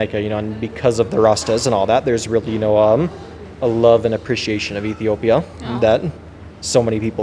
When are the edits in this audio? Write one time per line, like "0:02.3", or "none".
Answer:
none

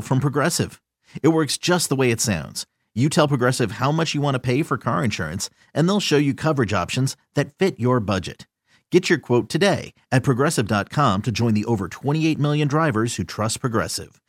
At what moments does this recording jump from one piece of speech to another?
none

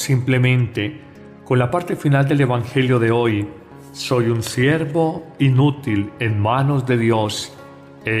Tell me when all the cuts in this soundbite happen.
0:01.2

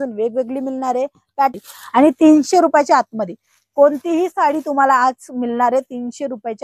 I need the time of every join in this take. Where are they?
0:01.5

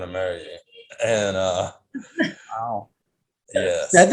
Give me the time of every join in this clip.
none

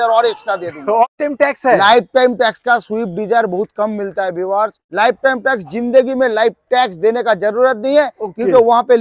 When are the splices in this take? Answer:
0:01.0
0:04.8

